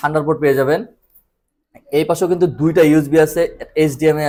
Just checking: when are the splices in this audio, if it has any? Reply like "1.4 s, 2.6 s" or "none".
none